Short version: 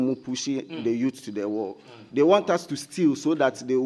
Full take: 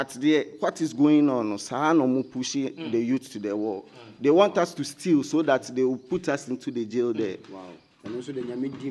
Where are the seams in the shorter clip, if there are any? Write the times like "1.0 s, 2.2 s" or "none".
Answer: none